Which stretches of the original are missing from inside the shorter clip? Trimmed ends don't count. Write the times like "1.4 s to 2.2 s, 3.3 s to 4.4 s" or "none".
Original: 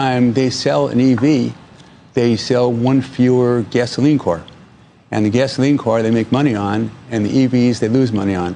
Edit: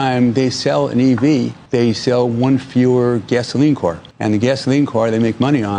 1.6 s to 2.0 s, 4.5 s to 5.0 s